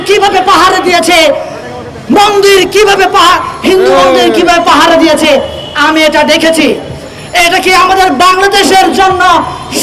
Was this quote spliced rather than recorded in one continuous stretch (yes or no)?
no